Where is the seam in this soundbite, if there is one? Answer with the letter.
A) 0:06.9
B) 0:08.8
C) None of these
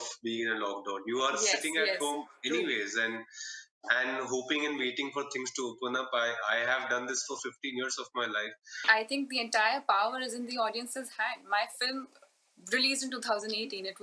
B